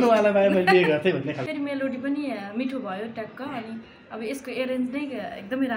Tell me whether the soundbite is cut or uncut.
cut